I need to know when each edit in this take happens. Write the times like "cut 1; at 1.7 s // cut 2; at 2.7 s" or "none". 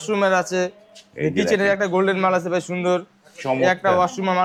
none